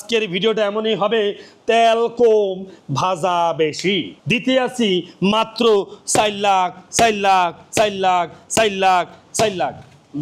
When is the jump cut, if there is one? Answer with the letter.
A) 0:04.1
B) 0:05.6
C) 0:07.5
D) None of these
A